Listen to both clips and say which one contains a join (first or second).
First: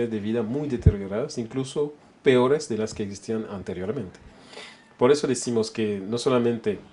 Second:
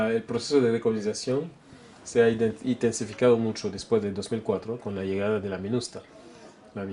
first